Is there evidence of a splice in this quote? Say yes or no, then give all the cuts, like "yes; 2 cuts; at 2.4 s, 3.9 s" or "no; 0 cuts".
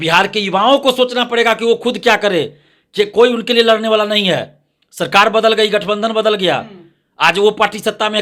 no; 0 cuts